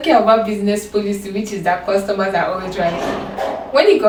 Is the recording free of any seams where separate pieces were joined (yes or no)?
yes